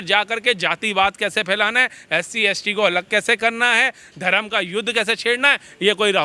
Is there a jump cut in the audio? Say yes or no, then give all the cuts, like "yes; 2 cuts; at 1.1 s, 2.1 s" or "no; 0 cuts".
no; 0 cuts